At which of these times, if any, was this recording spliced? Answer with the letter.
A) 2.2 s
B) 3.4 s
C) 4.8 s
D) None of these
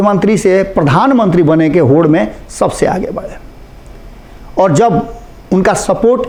D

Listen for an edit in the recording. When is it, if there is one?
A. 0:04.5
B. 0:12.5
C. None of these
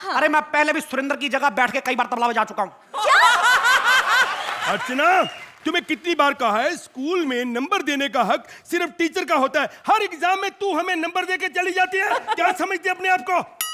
A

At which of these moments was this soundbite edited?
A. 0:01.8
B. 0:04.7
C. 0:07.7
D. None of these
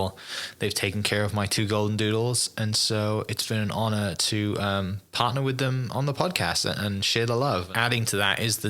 C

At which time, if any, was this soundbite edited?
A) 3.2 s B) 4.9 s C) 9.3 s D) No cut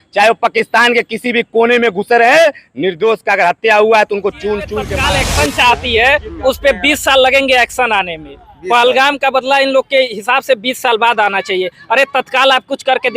B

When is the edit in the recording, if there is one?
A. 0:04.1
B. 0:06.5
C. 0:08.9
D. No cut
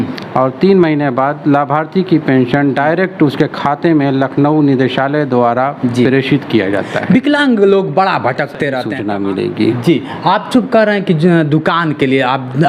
C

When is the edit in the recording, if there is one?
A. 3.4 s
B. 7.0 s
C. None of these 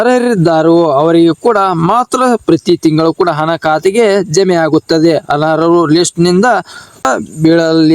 B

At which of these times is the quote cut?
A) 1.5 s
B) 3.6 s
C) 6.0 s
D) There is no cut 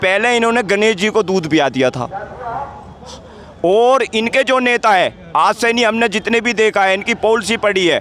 D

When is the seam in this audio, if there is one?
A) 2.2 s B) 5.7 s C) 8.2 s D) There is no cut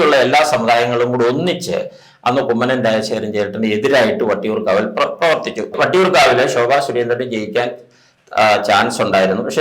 B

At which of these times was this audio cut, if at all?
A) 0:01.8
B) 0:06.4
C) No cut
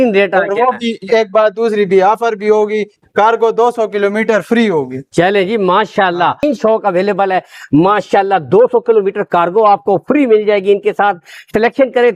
B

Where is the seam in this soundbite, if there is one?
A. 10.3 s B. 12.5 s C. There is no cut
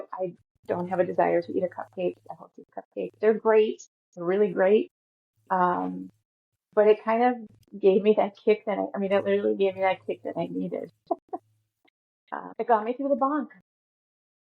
B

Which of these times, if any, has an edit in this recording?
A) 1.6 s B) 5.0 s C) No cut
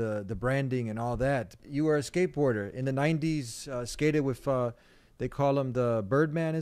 A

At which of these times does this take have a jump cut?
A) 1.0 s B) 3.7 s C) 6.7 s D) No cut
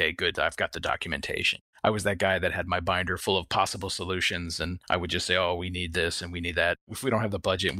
D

